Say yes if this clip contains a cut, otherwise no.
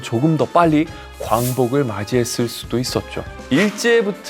yes